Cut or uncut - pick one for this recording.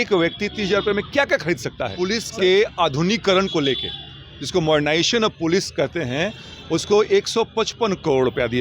cut